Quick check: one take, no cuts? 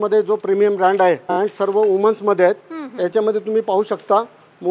no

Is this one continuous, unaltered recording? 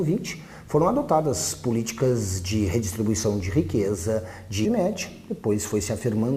yes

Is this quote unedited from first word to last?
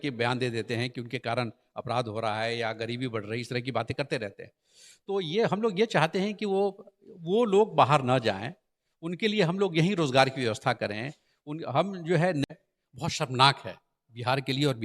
no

